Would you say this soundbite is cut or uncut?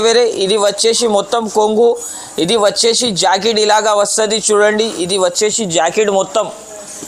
uncut